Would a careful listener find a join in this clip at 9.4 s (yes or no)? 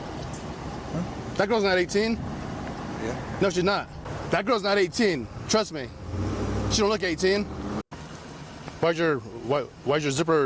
no